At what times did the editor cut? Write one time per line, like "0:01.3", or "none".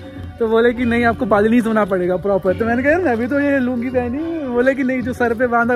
none

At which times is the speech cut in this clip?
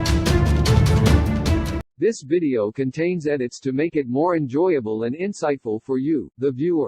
0:01.9

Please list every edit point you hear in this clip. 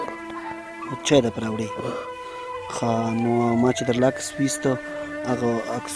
0:02.4

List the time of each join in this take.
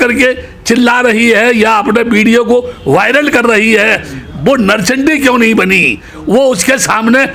none

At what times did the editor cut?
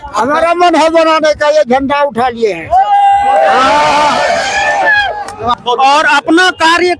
0:05.5

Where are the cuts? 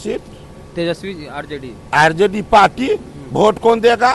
none

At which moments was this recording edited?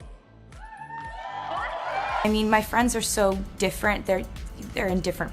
0:02.3

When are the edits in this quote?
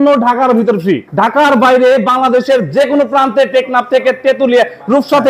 0:01.3

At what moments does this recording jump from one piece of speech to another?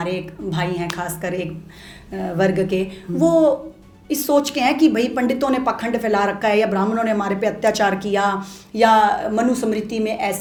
none

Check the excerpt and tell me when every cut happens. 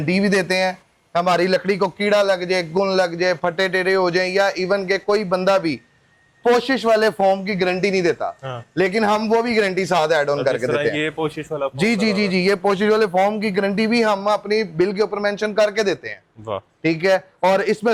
none

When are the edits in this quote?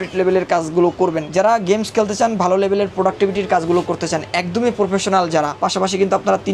0:01.2
0:05.5

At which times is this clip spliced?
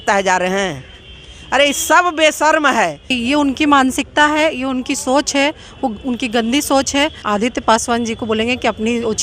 0:03.1
0:07.2

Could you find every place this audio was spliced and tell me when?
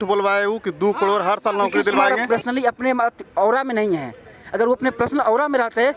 0:02.1

